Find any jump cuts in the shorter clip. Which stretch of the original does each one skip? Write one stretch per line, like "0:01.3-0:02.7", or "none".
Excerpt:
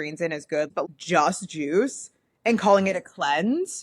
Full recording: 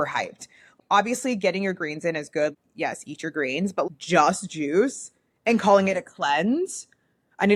0:02.7-0:03.9